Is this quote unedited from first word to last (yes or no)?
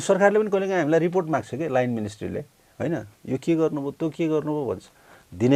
yes